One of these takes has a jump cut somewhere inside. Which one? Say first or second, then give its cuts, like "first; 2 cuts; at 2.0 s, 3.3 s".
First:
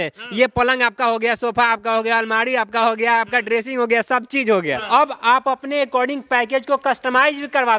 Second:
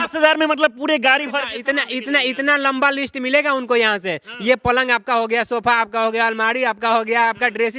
first; 1 cut; at 4.8 s